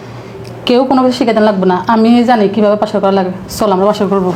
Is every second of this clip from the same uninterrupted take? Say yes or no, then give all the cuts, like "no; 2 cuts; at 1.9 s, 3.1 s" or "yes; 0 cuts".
yes; 0 cuts